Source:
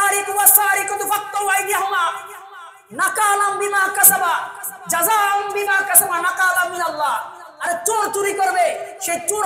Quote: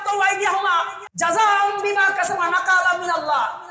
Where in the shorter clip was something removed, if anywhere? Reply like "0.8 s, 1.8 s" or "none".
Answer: 1.0 s